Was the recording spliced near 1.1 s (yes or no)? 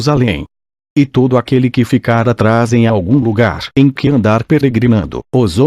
yes